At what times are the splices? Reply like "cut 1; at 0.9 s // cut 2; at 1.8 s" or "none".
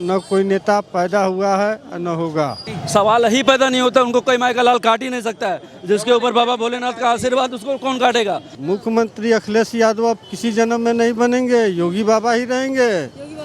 cut 1; at 2.7 s // cut 2; at 8.5 s